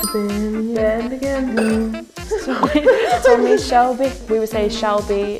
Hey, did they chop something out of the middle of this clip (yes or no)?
no